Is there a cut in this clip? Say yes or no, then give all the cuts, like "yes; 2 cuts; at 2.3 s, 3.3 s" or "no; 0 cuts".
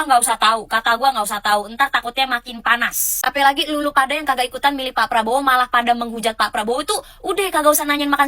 yes; 1 cut; at 3.1 s